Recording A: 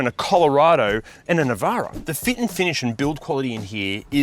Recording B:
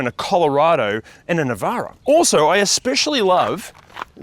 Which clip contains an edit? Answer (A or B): A